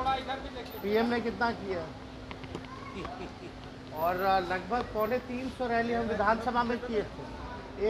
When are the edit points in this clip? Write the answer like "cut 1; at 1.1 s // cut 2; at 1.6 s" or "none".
none

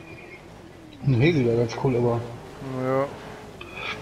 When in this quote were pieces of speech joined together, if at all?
none

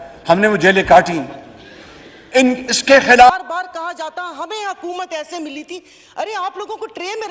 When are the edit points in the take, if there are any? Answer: cut 1; at 3.4 s

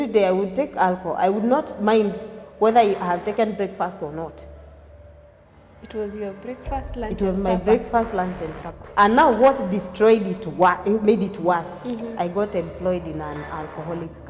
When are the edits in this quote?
cut 1; at 8.8 s

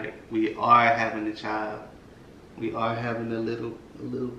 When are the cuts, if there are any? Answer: none

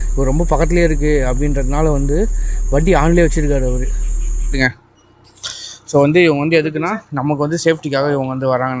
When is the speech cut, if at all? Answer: cut 1; at 4.5 s

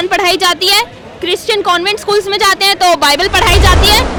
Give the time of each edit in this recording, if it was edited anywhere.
none

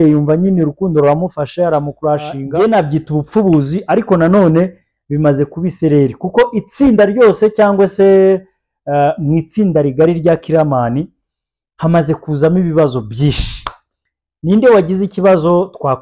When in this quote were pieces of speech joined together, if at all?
cut 1; at 2.4 s

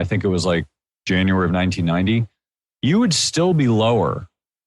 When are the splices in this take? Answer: cut 1; at 1.0 s

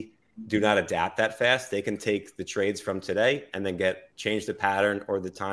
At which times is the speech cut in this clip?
none

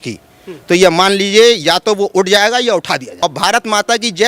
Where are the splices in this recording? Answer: cut 1; at 3.1 s

